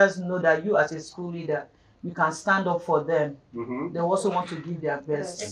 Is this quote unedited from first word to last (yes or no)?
yes